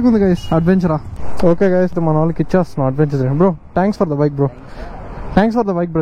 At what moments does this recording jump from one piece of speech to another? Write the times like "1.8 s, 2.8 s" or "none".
none